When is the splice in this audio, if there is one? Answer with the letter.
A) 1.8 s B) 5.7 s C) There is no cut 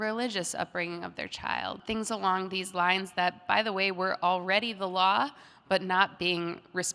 A